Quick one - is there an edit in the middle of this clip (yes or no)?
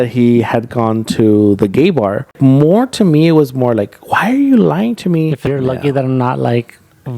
yes